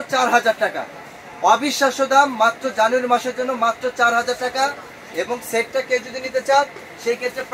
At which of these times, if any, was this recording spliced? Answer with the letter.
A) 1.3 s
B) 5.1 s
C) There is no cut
C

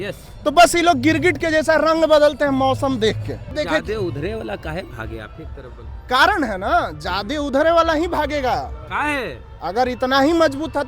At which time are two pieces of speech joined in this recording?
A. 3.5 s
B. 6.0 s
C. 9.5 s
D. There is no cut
A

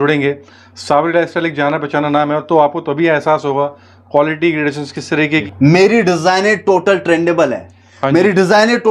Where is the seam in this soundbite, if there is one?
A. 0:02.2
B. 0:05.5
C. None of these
B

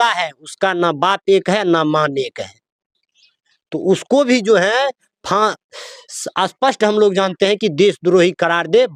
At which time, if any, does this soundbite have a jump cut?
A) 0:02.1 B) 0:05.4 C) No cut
C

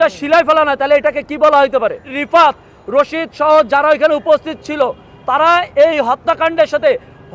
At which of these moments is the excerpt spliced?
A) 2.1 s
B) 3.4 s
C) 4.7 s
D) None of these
A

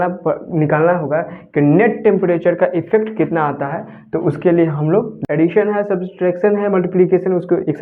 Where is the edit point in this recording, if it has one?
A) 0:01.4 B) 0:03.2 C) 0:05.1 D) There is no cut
C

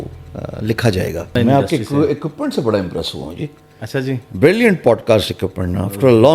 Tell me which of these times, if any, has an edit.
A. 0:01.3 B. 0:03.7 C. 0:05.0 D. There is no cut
A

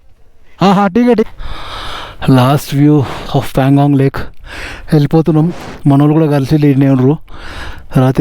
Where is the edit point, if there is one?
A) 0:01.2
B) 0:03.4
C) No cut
A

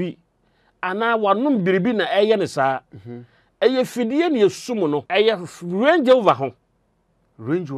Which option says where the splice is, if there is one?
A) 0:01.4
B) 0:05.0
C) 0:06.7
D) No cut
B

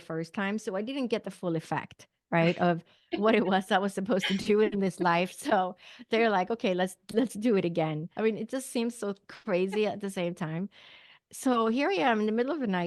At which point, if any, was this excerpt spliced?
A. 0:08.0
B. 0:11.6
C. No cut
A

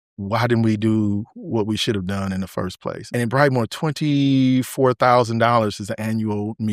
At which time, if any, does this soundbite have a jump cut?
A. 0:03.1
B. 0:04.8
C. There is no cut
A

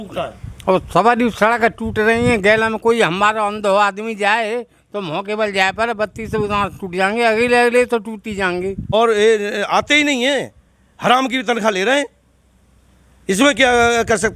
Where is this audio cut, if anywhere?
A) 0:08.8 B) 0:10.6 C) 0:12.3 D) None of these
A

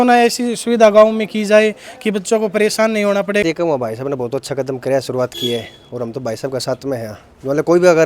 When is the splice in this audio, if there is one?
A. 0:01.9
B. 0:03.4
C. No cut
B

